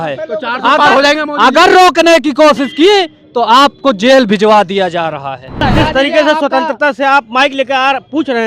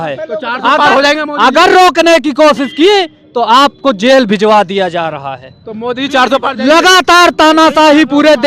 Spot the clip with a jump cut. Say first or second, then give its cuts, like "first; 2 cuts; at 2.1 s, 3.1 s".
first; 1 cut; at 5.6 s